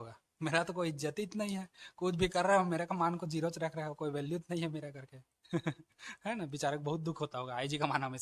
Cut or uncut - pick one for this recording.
uncut